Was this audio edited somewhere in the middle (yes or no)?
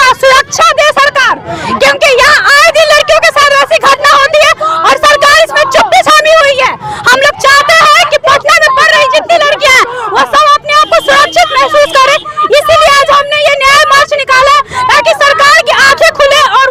no